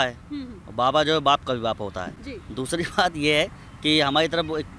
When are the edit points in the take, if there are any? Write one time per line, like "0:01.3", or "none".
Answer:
none